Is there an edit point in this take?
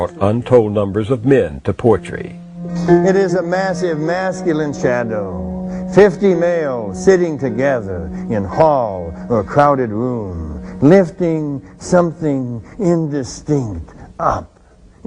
yes; 1 cut; at 5.1 s

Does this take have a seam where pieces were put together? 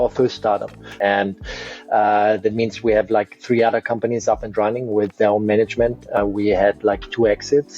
yes; 2 cuts; at 0.9 s, 6.2 s

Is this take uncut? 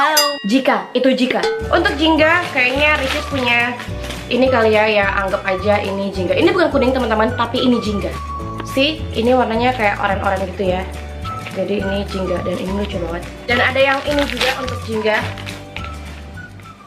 no; 1 cut; at 4.8 s

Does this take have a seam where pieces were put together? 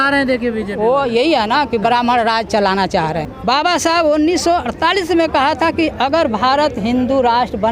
yes; 1 cut; at 3.2 s

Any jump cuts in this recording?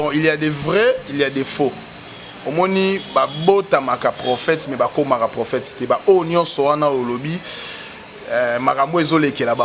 no; 0 cuts

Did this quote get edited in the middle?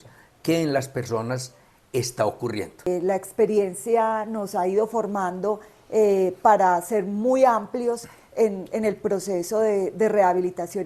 yes; 1 cut; at 2.9 s

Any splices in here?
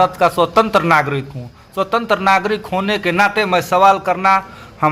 no; 0 cuts

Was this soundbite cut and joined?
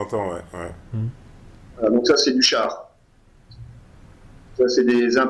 no; 0 cuts

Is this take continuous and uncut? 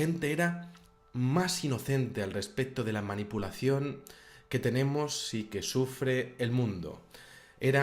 no; 1 cut; at 2.0 s

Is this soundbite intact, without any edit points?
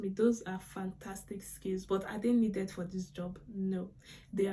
yes; 0 cuts

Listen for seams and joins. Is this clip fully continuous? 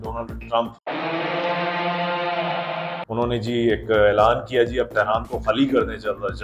yes; 0 cuts

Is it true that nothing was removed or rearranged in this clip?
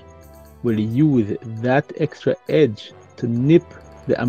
no; 1 cut; at 3.1 s

